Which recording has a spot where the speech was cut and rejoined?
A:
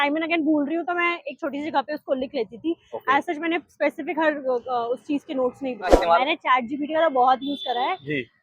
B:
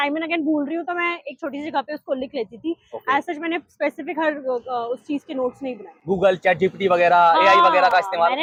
A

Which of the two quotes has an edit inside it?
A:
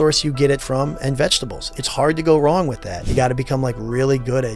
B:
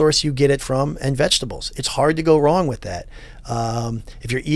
A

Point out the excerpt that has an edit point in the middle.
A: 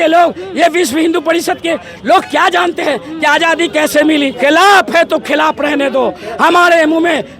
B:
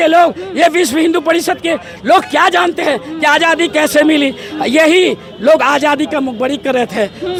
A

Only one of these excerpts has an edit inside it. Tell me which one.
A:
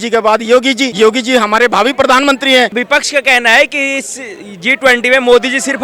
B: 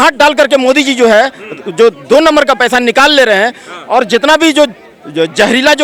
A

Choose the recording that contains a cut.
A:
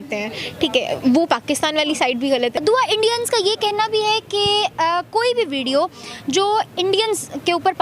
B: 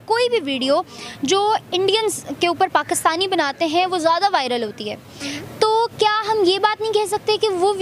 A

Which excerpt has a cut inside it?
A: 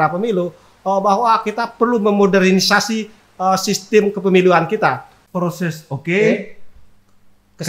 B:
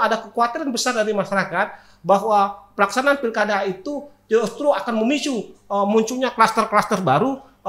A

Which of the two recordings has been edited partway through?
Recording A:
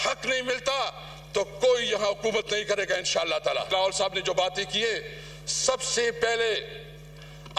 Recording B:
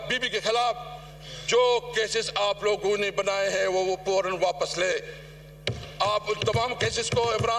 A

